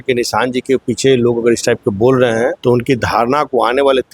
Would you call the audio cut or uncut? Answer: cut